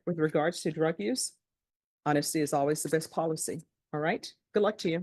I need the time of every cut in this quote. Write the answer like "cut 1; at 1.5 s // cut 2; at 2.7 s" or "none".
none